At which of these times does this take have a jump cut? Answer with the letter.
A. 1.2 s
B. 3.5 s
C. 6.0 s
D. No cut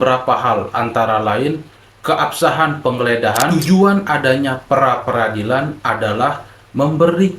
B